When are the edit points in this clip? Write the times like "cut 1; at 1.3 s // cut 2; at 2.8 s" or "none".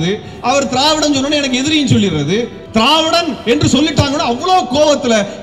cut 1; at 2.6 s